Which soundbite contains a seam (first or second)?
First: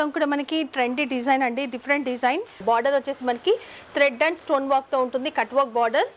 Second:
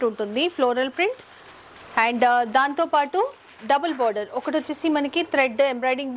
first